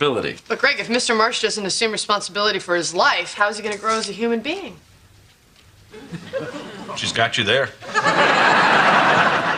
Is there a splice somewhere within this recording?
no; 0 cuts

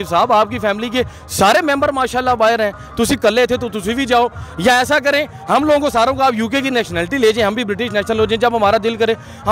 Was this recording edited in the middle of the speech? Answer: no; 0 cuts

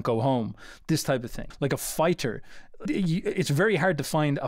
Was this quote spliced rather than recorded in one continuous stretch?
yes; 2 cuts; at 1.4 s, 2.9 s

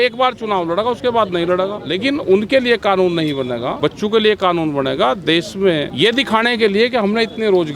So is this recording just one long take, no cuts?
no; 3 cuts; at 1.9 s, 3.7 s, 5.9 s

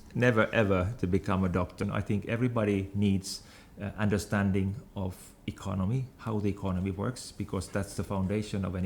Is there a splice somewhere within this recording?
yes; 1 cut; at 1.8 s

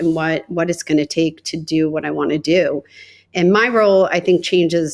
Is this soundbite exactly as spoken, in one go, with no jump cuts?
yes; 0 cuts

